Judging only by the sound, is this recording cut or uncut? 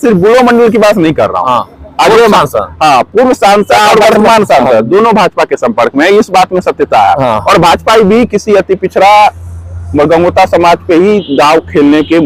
uncut